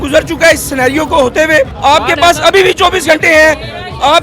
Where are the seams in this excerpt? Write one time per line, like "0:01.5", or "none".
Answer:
0:01.7